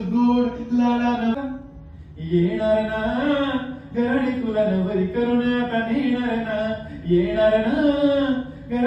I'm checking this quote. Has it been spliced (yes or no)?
no